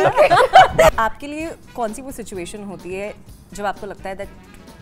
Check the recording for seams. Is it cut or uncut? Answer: cut